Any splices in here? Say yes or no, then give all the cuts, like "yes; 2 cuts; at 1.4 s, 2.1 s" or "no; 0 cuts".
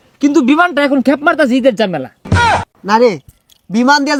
no; 0 cuts